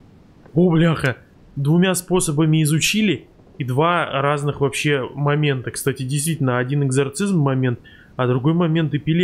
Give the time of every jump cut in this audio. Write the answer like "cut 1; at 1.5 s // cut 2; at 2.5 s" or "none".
none